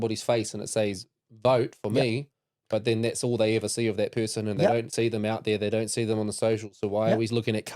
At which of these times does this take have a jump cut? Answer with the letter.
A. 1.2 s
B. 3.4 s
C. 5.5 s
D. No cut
D